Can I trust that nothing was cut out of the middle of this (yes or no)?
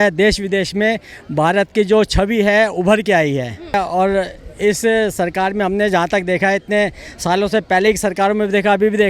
no